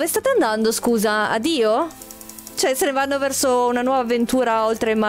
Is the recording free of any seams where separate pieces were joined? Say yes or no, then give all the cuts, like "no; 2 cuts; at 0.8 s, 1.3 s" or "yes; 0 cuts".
yes; 0 cuts